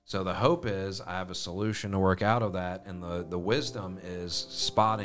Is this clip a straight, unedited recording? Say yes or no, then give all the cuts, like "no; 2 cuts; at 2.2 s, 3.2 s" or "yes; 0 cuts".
yes; 0 cuts